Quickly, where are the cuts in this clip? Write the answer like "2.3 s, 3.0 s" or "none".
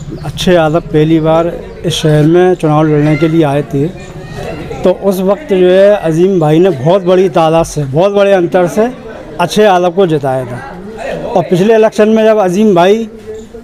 none